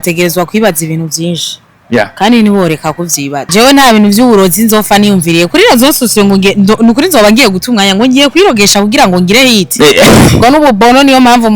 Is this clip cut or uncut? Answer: cut